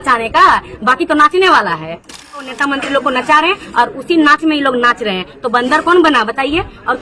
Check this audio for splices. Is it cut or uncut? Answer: cut